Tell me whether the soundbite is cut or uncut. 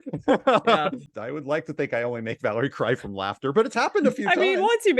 cut